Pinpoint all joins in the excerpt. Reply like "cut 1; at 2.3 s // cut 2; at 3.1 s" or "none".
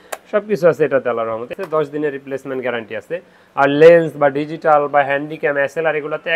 cut 1; at 1.6 s